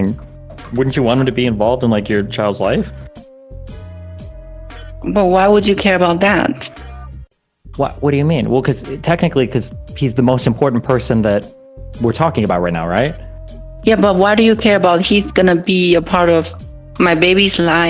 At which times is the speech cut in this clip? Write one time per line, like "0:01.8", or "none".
none